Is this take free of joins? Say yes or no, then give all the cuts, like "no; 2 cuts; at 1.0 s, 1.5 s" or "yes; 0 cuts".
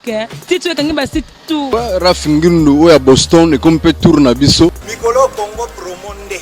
no; 2 cuts; at 1.7 s, 4.9 s